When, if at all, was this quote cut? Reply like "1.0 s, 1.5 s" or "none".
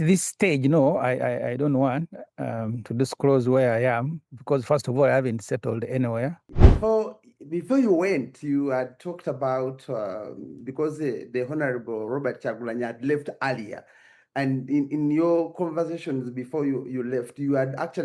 6.4 s